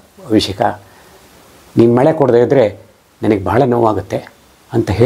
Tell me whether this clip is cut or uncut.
uncut